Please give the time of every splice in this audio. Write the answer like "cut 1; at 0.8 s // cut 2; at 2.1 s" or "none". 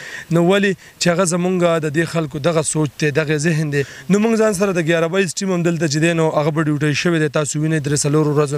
cut 1; at 3.9 s